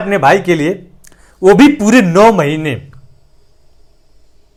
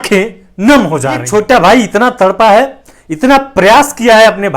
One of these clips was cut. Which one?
second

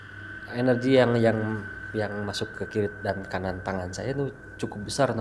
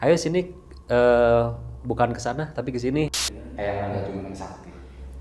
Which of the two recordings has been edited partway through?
second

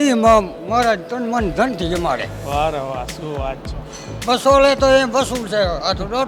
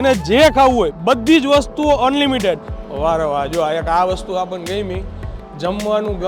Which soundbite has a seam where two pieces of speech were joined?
second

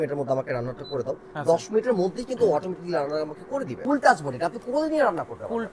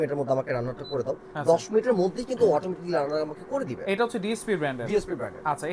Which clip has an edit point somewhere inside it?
first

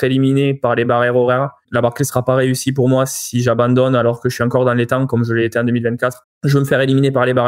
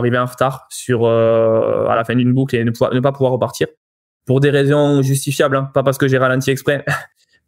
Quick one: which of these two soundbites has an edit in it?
first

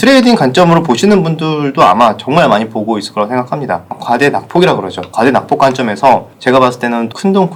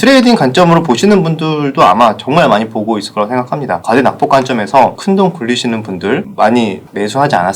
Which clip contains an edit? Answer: second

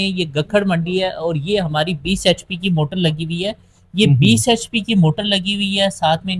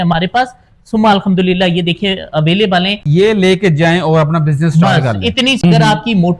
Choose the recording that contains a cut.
second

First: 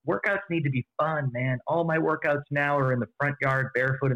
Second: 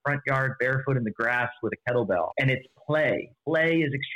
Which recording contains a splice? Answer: second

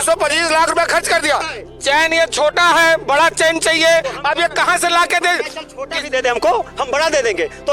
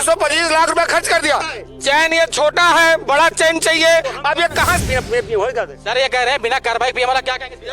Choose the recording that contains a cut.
second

